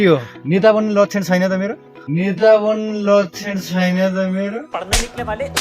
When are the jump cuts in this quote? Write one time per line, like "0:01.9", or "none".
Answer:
0:04.7